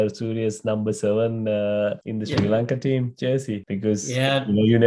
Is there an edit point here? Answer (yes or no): yes